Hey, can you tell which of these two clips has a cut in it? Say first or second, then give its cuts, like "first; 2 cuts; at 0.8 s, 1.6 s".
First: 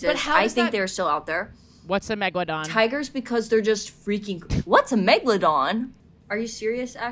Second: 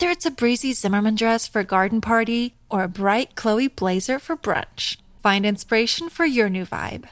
first; 2 cuts; at 2.7 s, 6.0 s